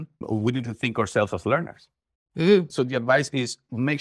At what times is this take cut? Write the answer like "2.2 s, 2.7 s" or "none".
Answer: 2.7 s